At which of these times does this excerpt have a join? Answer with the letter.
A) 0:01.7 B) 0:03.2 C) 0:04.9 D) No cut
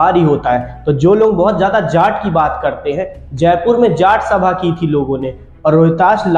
D